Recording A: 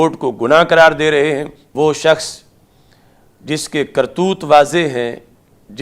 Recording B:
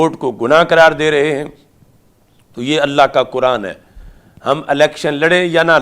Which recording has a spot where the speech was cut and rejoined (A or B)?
A